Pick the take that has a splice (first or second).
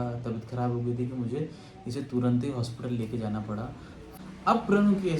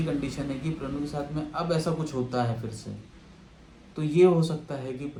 first